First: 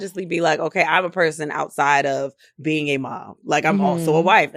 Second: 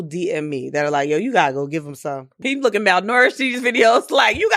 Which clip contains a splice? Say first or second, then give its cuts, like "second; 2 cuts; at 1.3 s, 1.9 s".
second; 1 cut; at 2.4 s